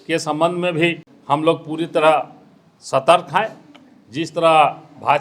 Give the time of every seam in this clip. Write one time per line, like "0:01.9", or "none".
0:01.1

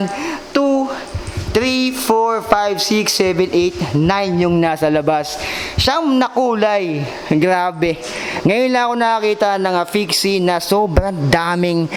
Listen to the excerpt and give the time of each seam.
none

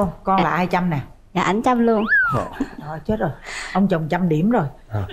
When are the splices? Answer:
none

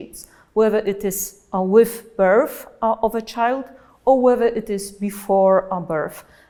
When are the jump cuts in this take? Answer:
none

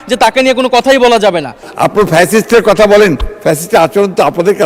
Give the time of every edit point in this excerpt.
0:01.6

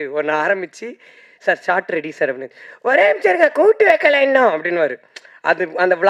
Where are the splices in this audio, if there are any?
none

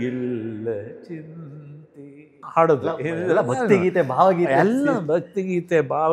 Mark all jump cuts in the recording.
0:02.4

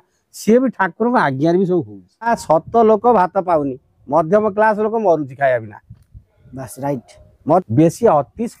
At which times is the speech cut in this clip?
0:02.3
0:07.6

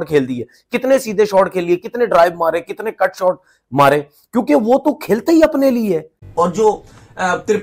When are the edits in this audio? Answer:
0:06.2

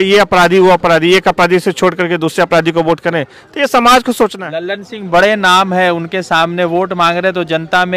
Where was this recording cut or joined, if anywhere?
0:04.5

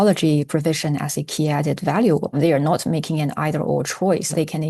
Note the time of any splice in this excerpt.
0:02.3

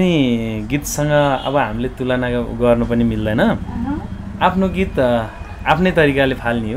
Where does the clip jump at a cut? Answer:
none

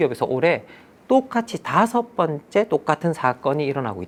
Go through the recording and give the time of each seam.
none

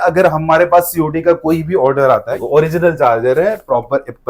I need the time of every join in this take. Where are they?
0:02.3

